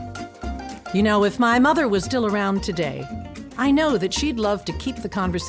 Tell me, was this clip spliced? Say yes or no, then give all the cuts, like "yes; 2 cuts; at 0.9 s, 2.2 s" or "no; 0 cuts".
yes; 1 cut; at 0.9 s